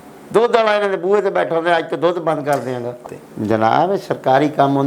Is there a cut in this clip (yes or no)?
yes